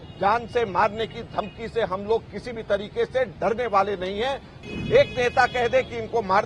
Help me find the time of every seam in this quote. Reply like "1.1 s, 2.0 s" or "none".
4.5 s